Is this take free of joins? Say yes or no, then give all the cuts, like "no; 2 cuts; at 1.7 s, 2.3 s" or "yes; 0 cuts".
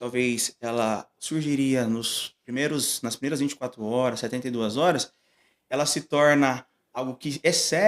yes; 0 cuts